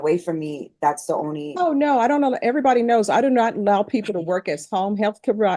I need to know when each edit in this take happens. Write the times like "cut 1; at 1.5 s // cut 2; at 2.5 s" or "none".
none